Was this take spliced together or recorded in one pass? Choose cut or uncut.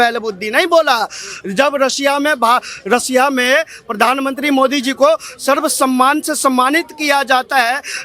uncut